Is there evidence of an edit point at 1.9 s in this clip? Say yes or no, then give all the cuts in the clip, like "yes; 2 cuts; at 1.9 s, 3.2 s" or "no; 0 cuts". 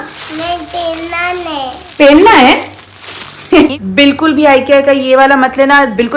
no; 1 cut; at 3.7 s